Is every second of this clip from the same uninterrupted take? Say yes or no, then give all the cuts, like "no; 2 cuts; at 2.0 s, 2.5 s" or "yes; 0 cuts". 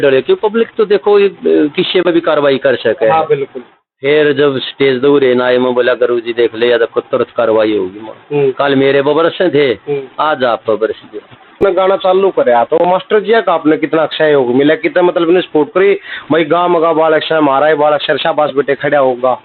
no; 1 cut; at 11.6 s